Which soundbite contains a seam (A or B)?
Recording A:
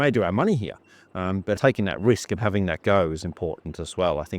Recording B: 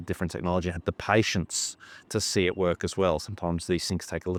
A